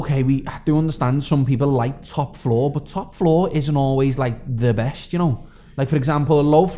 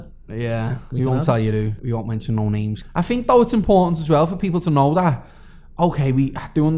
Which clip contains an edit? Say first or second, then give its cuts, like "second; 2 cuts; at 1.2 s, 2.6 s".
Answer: second; 2 cuts; at 1.7 s, 2.8 s